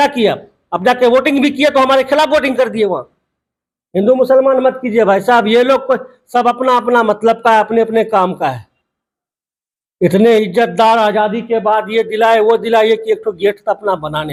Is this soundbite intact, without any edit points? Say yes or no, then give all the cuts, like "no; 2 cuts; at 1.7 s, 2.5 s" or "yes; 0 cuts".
yes; 0 cuts